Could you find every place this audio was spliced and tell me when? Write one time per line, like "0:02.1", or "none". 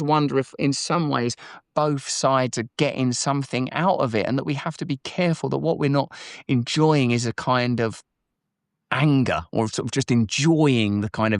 none